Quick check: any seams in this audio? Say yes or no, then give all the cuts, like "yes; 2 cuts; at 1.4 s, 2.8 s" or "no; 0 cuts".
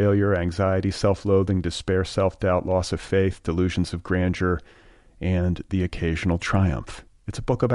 no; 0 cuts